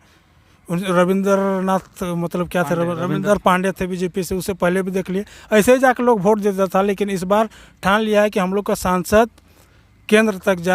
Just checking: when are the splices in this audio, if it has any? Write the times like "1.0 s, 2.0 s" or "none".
none